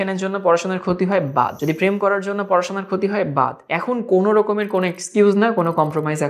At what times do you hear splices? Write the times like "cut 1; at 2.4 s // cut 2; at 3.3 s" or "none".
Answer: cut 1; at 1.6 s // cut 2; at 3.7 s